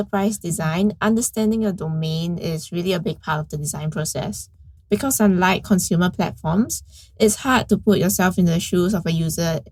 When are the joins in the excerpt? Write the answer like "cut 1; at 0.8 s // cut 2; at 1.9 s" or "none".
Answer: none